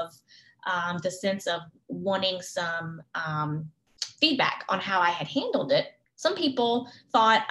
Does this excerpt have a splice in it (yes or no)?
yes